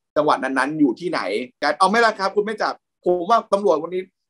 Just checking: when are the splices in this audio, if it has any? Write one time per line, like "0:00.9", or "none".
0:01.5